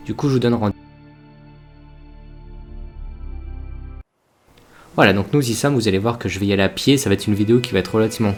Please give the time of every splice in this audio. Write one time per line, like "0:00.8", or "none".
none